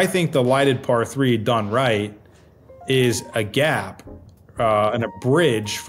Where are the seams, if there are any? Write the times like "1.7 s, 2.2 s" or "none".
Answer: none